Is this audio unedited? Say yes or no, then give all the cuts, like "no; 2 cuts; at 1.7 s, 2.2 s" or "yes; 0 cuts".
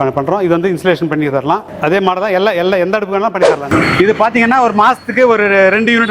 no; 1 cut; at 3.7 s